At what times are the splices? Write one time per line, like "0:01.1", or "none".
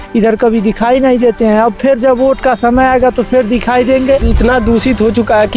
0:04.3